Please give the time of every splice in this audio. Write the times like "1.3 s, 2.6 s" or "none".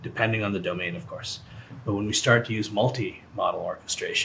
none